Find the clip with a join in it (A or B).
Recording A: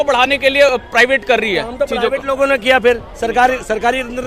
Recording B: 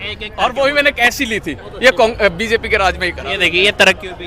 B